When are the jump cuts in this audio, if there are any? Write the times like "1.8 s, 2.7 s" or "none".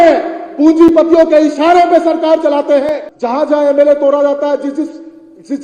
3.1 s